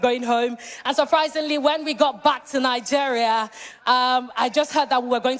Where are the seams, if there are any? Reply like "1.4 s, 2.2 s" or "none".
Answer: none